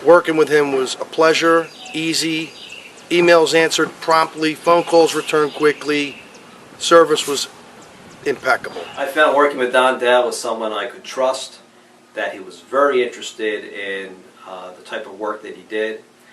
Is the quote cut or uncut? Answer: cut